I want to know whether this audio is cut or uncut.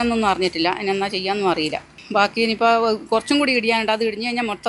uncut